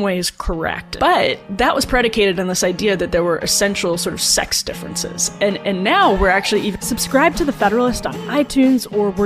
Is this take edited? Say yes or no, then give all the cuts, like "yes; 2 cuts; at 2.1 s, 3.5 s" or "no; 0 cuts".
yes; 2 cuts; at 0.8 s, 6.8 s